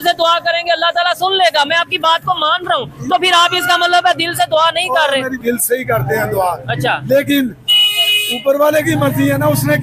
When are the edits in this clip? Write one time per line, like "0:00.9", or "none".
0:05.4